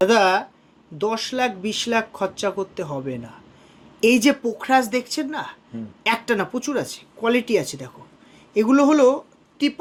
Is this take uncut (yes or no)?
yes